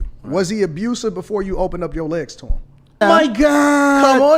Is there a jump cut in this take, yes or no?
yes